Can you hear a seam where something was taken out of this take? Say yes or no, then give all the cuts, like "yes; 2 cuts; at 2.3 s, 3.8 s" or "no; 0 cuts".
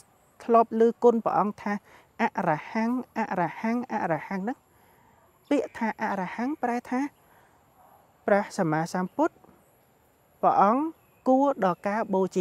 no; 0 cuts